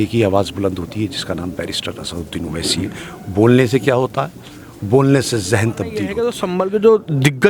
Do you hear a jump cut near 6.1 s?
yes; 1 cut; at 6.1 s

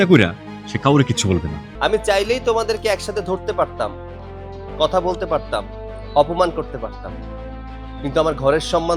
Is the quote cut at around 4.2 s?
no; 1 cut; at 1.7 s

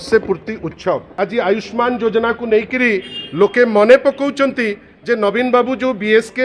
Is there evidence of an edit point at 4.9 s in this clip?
no; 1 cut; at 1.1 s

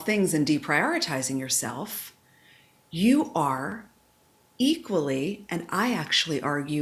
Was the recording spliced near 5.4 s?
no; 0 cuts

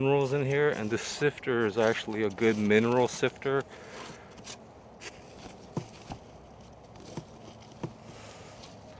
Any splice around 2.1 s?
no; 0 cuts

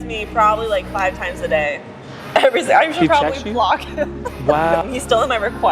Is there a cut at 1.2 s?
no; 1 cut; at 4.8 s

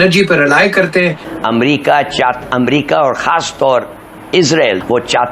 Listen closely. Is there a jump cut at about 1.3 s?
yes; 1 cut; at 1.3 s

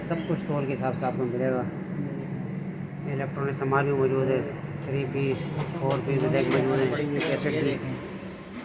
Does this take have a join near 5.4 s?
no; 1 cut; at 7.1 s

